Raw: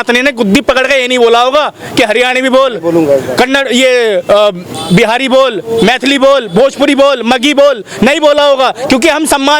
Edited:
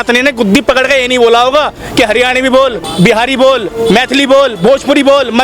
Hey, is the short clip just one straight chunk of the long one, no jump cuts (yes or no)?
no